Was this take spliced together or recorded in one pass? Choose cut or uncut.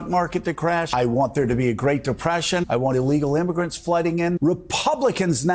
cut